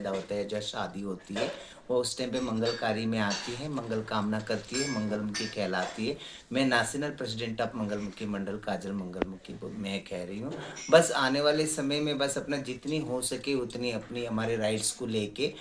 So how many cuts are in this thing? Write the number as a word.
zero